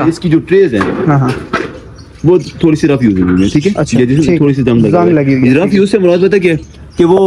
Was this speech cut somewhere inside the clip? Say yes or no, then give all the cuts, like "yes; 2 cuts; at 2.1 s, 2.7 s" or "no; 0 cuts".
no; 0 cuts